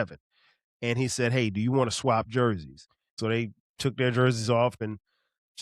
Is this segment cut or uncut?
cut